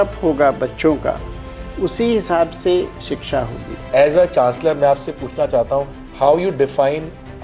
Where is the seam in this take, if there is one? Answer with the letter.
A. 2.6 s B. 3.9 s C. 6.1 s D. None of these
B